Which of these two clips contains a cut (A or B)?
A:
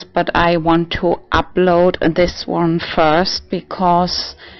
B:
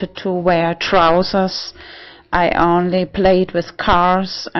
A